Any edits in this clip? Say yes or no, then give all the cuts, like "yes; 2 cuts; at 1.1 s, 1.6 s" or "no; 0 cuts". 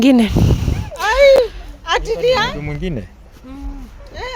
no; 0 cuts